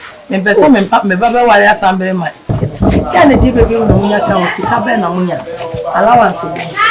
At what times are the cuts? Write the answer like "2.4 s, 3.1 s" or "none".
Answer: 2.6 s